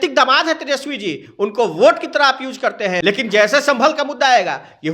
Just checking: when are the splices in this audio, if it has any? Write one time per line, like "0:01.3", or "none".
0:03.0